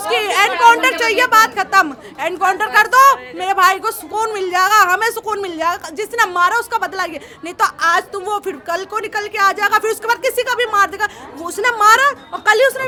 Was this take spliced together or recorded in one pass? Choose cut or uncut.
uncut